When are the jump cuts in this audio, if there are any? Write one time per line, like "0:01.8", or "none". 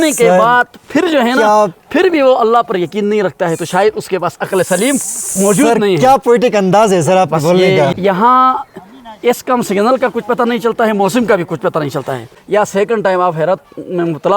0:07.9
0:12.3